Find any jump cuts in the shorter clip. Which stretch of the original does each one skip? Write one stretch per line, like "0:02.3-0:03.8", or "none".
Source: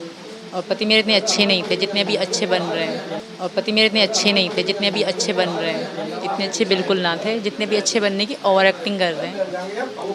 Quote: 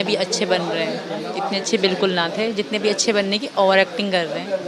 0:02.9-0:05.8